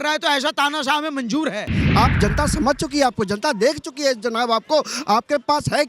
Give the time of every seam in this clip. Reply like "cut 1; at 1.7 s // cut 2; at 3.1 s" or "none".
cut 1; at 1.8 s